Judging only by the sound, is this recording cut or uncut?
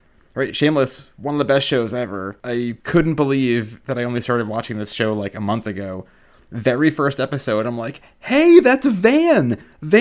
cut